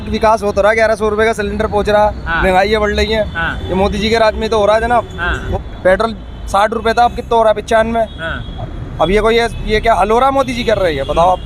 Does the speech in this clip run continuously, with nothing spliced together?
no; 1 cut; at 5.4 s

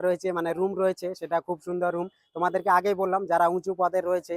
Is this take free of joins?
yes; 0 cuts

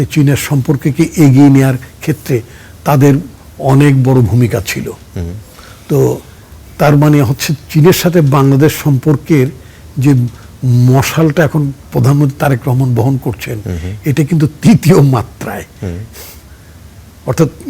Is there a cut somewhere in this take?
no; 0 cuts

